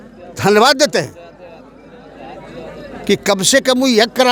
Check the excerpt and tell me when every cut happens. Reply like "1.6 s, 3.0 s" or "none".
none